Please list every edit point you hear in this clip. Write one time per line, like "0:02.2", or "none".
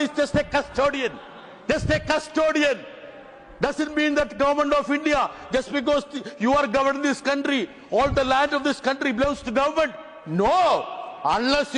none